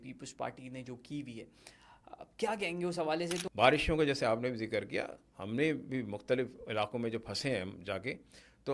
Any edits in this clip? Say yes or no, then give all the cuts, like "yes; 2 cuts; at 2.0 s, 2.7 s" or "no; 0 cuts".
yes; 1 cut; at 3.4 s